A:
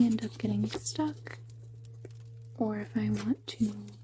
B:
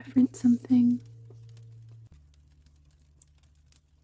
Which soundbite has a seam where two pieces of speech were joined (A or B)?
B